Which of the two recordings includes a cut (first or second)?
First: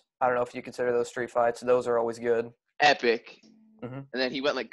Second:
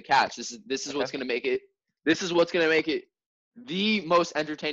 first